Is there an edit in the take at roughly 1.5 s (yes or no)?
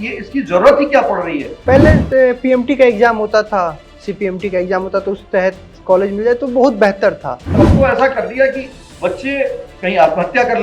yes